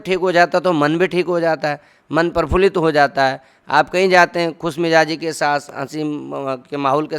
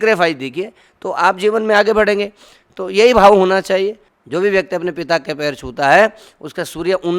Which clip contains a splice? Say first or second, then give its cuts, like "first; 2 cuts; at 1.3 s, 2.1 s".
second; 1 cut; at 4.1 s